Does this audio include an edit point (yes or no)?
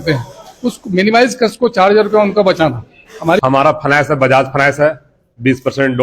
yes